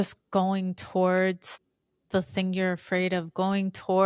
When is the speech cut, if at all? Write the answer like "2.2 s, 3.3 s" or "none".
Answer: none

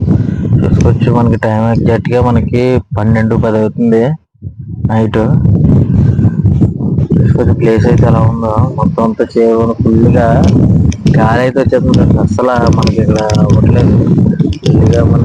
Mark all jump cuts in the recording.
none

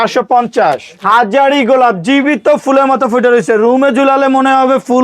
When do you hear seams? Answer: 0.9 s

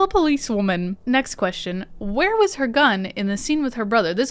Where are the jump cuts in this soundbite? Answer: none

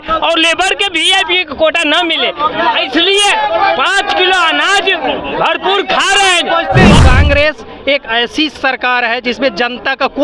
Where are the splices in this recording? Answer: 7.0 s

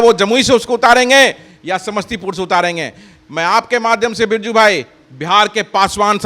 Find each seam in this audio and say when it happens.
none

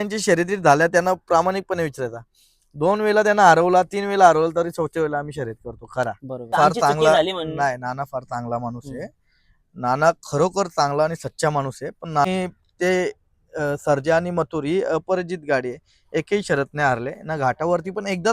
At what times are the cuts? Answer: 6.6 s, 12.3 s

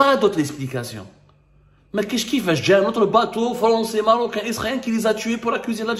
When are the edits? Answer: none

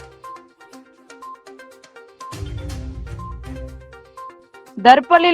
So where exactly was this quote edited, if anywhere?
1.8 s, 4.5 s

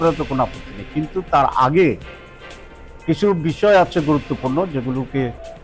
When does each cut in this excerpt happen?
none

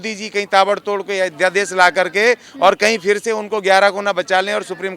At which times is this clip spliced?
none

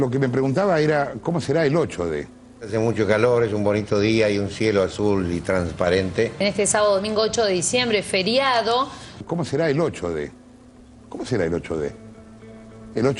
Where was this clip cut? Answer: none

